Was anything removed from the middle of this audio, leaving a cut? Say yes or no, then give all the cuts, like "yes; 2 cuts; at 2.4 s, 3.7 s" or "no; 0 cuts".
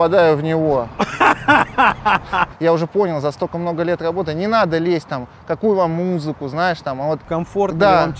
yes; 2 cuts; at 2.5 s, 7.2 s